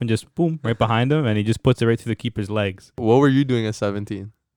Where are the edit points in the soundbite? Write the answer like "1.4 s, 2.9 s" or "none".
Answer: 2.9 s